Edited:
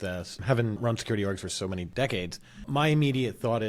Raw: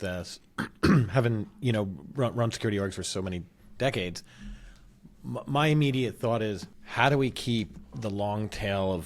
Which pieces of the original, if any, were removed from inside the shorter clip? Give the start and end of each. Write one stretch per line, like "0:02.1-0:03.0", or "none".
0:00.8-0:02.3
0:03.4-0:03.7
0:04.5-0:05.4